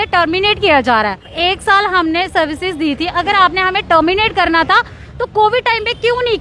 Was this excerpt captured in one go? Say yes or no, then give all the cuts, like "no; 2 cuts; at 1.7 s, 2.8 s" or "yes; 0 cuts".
no; 1 cut; at 1.3 s